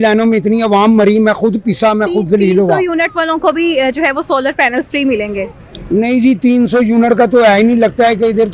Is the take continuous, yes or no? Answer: yes